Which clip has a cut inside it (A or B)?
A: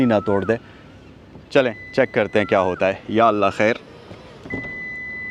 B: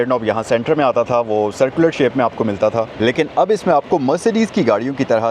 B